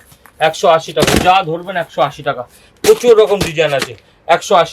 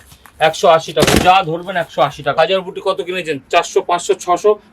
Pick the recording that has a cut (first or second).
second